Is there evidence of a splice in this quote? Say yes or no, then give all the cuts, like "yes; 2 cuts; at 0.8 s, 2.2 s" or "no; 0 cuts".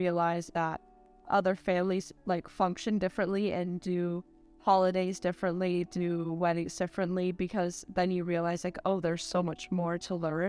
no; 0 cuts